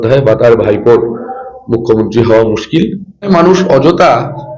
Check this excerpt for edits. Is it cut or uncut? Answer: cut